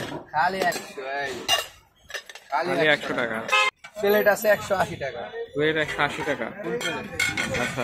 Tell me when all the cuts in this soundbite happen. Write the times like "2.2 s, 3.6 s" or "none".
3.7 s